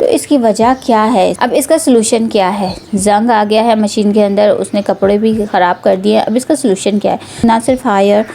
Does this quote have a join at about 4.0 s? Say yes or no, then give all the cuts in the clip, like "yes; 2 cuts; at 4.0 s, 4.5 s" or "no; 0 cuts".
no; 2 cuts; at 1.4 s, 7.4 s